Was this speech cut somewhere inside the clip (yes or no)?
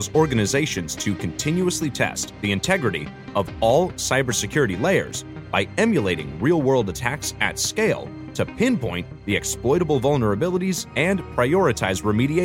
no